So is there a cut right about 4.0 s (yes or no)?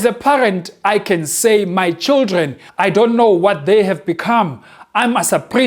no